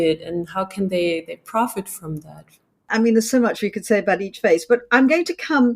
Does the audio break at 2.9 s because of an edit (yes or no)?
yes